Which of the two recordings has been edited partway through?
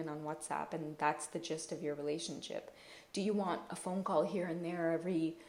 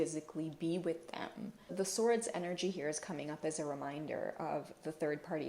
second; 1 cut; at 1.7 s

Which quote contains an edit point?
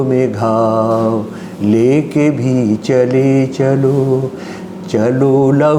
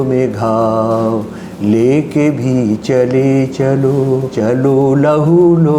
second; 1 cut; at 4.3 s

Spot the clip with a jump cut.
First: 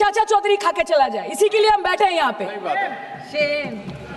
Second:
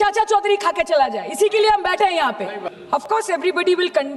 second; 1 cut; at 2.6 s

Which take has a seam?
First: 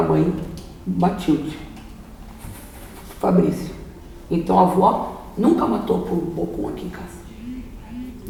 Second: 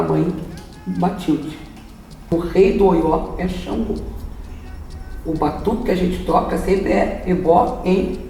second; 1 cut; at 2.3 s

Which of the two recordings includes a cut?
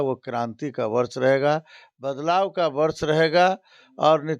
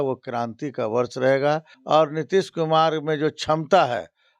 second; 1 cut; at 1.7 s

